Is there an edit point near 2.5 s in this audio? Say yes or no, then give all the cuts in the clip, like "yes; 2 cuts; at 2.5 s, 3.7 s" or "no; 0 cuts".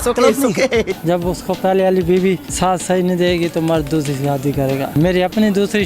yes; 3 cuts; at 0.9 s, 2.5 s, 4.9 s